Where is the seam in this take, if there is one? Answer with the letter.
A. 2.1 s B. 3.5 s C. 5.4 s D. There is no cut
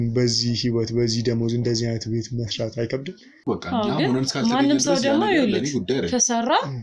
B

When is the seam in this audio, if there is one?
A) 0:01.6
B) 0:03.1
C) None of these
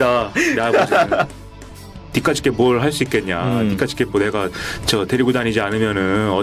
A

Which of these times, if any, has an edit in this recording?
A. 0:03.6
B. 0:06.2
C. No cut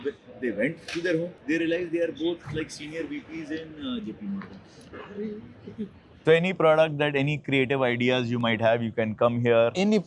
B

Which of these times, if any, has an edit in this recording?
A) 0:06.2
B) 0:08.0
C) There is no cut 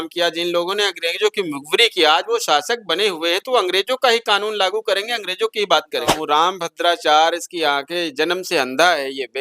A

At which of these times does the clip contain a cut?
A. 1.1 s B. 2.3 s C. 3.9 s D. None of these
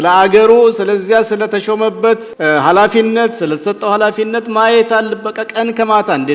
B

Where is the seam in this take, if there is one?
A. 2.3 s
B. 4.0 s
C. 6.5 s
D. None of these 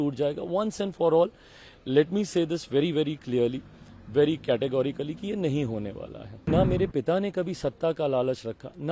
C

